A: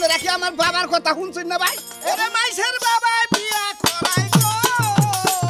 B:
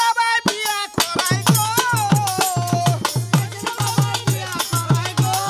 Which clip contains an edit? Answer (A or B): A